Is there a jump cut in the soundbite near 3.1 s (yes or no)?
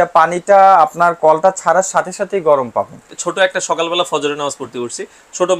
yes